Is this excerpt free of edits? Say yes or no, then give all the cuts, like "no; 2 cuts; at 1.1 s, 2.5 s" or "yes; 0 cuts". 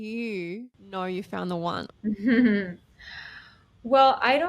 no; 1 cut; at 1.9 s